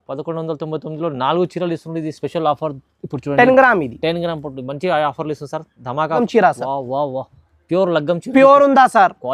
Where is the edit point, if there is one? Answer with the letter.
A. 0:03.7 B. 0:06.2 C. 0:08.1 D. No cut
B